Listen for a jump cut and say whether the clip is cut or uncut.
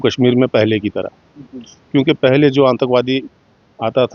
uncut